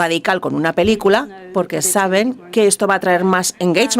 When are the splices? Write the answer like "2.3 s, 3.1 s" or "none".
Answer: 1.4 s